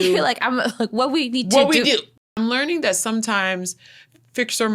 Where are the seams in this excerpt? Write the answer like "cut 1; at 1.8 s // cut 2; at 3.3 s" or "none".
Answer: cut 1; at 2.1 s